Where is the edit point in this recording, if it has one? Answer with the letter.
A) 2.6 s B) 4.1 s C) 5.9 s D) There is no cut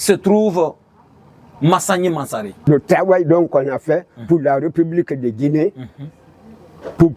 A